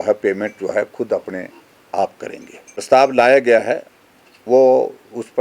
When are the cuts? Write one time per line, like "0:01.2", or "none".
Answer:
0:02.8